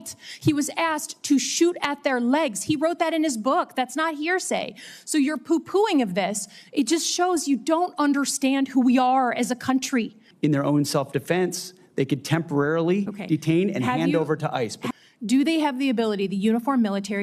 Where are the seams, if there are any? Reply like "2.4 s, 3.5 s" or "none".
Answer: 10.2 s, 14.8 s